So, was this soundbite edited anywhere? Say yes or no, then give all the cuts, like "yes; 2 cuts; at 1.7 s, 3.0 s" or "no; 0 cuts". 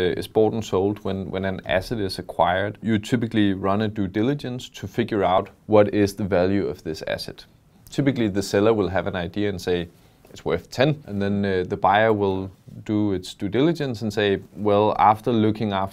yes; 3 cuts; at 2.8 s, 5.4 s, 11.1 s